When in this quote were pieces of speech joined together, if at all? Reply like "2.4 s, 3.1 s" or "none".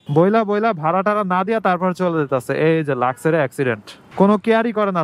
4.0 s